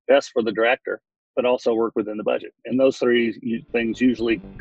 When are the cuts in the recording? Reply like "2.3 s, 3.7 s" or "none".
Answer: none

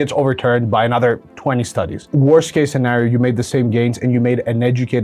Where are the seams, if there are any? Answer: 2.1 s

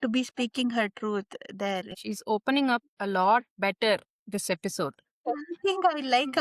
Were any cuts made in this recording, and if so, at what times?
none

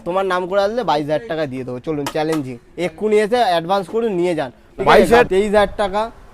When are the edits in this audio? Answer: 5.3 s

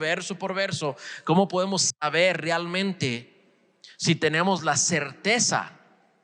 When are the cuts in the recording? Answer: none

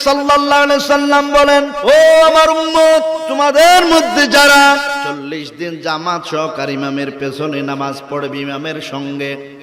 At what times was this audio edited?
1.9 s, 3.2 s, 5.1 s

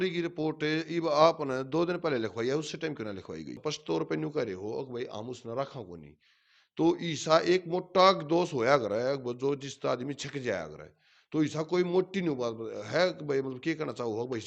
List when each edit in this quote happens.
3.5 s

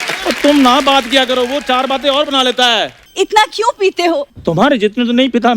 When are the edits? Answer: 3.0 s

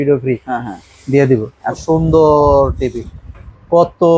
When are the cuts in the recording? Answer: 1.8 s

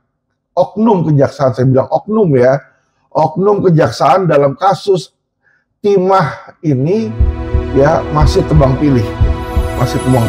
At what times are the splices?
none

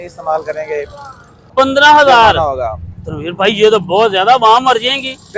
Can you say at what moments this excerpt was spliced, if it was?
1.5 s

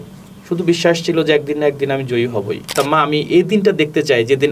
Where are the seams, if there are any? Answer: 2.7 s

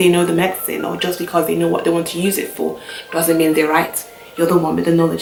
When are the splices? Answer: none

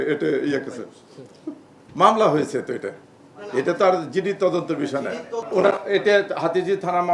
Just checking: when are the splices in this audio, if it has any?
5.4 s

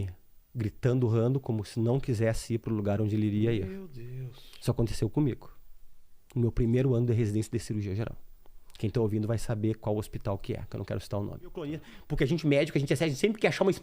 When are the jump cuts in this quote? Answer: 12.0 s

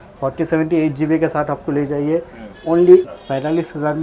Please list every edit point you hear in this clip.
3.1 s

